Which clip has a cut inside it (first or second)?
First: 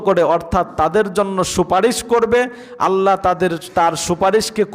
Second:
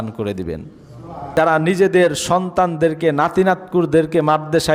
second